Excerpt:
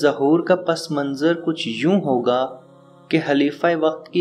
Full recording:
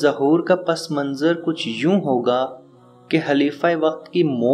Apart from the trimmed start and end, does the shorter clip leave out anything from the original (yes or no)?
no